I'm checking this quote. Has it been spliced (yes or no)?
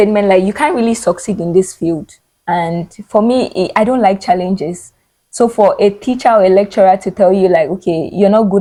no